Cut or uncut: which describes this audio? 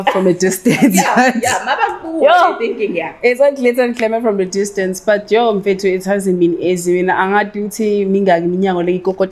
uncut